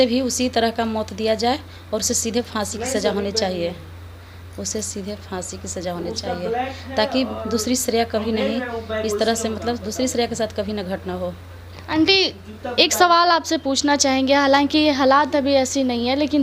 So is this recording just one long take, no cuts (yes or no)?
yes